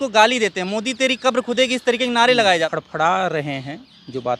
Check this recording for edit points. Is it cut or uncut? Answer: cut